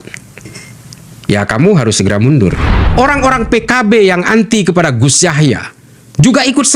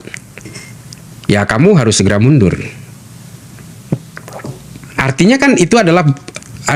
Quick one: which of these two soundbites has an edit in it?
first; 1 cut; at 2.8 s

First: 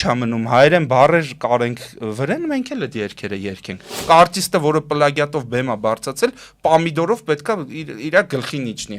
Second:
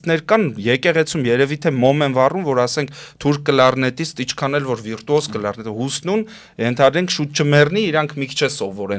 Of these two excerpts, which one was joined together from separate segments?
first; 1 cut; at 4.0 s

